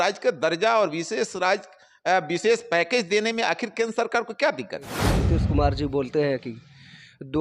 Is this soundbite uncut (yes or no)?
no